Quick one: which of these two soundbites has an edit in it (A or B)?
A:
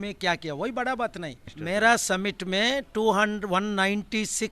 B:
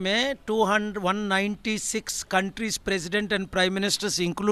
A